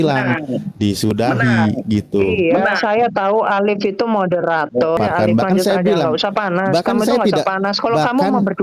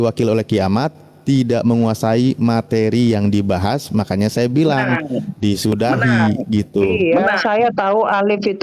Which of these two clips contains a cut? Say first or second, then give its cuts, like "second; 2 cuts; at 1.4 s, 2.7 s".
first; 1 cut; at 5.0 s